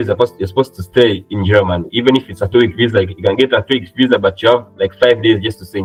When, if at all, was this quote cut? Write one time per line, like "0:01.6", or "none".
none